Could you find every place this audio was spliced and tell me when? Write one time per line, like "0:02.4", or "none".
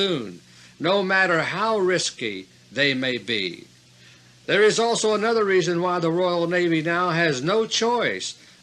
0:02.0